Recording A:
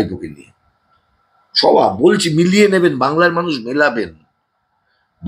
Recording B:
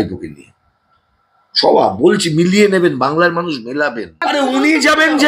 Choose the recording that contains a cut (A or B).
B